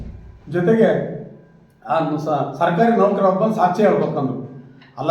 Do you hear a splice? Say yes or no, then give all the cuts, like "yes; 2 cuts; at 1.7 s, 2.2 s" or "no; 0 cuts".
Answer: no; 0 cuts